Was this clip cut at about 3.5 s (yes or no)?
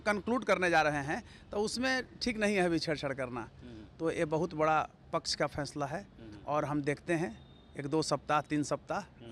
no